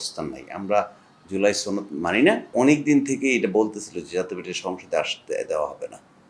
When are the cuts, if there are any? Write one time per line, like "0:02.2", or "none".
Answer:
0:02.5